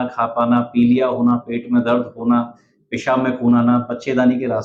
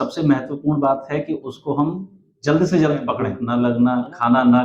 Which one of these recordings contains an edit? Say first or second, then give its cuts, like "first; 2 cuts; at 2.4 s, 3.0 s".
second; 1 cut; at 3.3 s